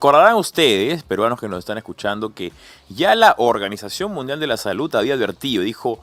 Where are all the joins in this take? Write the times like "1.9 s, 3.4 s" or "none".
none